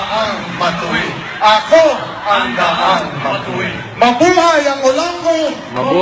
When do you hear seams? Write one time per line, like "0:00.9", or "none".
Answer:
none